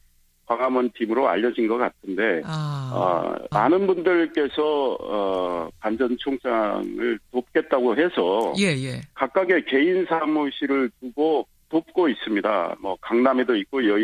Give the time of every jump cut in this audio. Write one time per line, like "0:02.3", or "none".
0:09.5